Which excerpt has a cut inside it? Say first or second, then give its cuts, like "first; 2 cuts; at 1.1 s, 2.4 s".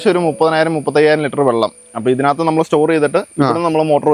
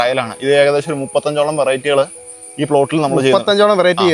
first; 1 cut; at 1.9 s